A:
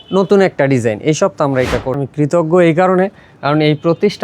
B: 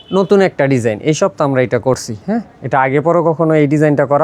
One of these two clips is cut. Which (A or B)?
A